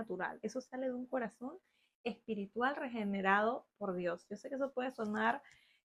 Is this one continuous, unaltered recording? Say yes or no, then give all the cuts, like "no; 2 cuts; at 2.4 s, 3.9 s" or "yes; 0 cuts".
yes; 0 cuts